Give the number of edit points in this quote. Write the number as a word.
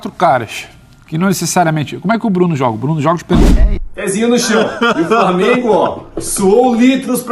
one